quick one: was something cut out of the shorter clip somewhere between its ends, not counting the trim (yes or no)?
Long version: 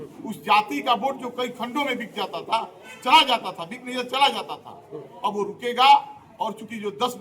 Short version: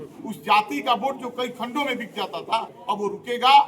yes